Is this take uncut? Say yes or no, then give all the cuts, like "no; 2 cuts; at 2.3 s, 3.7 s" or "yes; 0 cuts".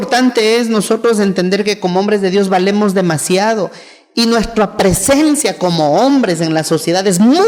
yes; 0 cuts